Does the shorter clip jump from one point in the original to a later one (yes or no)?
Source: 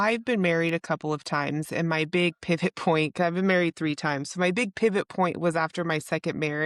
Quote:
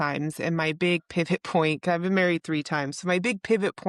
no